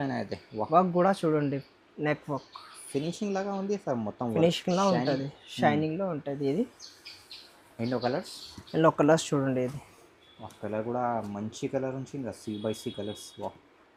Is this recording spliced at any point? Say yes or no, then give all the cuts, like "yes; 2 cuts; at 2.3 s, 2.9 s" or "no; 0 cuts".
no; 0 cuts